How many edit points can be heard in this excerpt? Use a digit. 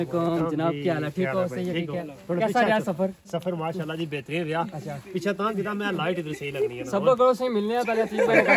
0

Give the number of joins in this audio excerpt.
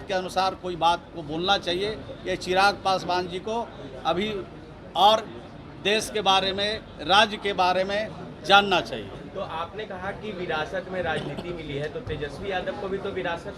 0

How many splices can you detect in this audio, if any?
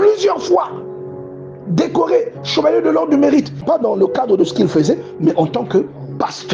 1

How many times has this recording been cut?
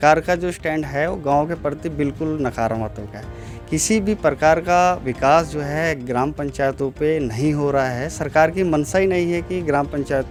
0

